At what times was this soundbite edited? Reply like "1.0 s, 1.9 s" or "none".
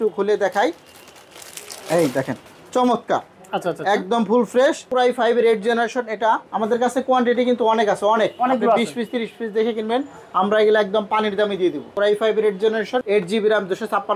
4.8 s, 6.5 s, 11.9 s, 13.0 s